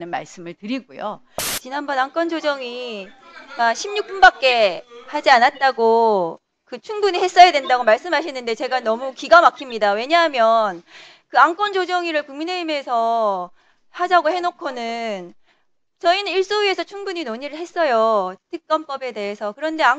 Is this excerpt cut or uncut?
cut